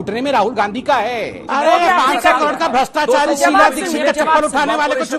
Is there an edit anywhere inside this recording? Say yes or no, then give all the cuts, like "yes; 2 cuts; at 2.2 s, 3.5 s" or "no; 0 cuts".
yes; 1 cut; at 1.4 s